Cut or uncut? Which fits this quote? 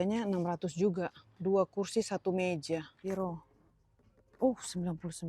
cut